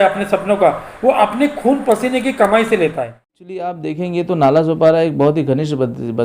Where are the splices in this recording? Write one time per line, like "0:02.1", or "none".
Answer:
0:03.8

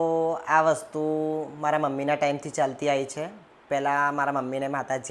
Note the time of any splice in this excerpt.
none

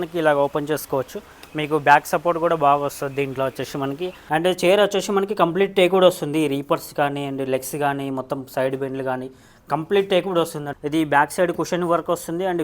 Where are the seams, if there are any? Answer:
0:04.2
0:10.7

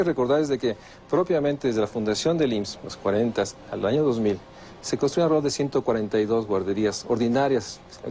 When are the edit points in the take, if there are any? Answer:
none

